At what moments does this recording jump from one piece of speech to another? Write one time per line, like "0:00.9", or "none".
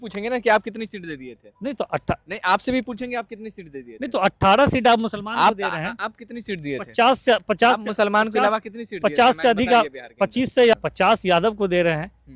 0:10.7